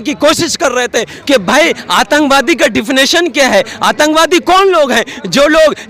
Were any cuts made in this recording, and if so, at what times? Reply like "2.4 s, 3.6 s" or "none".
1.1 s